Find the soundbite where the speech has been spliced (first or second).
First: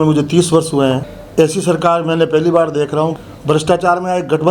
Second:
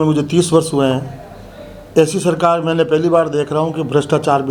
first